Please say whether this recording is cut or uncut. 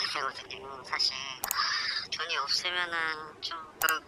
uncut